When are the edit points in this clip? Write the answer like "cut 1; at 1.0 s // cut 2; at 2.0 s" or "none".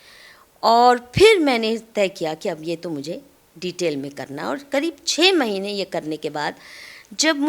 none